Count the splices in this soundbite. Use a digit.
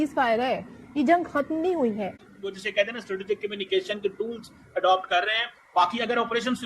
1